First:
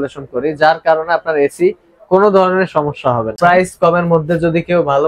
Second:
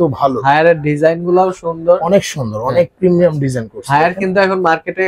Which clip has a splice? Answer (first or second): first